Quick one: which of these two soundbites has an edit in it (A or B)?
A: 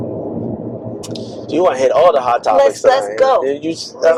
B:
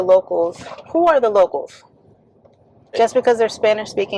B